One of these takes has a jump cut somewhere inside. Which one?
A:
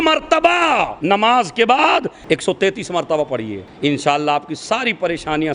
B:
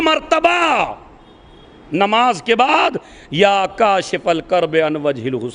A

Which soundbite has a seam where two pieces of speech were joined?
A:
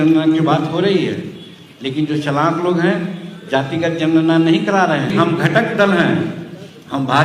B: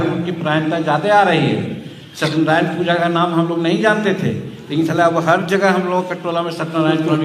A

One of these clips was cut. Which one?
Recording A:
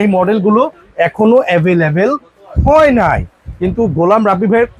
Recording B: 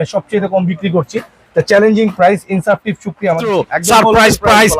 B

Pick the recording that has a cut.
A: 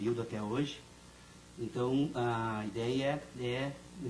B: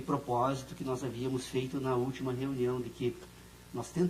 B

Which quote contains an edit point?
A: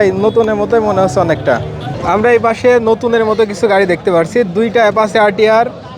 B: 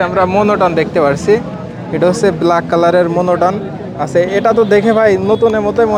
A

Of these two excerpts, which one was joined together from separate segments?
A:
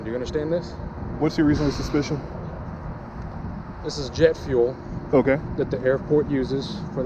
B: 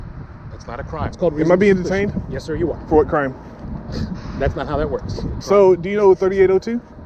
B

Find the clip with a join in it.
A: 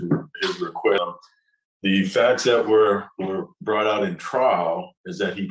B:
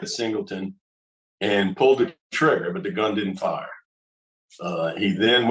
A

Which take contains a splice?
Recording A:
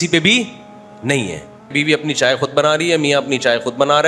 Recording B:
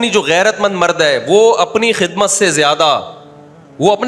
A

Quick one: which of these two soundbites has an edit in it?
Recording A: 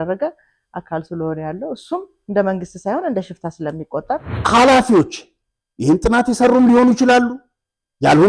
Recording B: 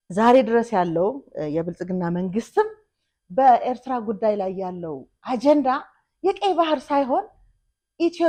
A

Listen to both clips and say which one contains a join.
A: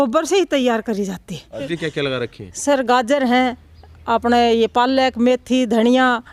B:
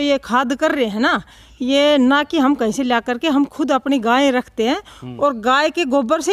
A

